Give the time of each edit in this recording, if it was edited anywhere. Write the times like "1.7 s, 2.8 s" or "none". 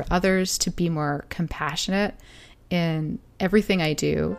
none